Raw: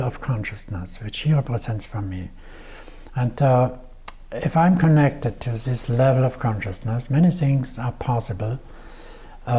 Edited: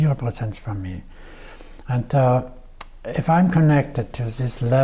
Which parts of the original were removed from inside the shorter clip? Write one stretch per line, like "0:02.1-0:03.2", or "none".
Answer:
none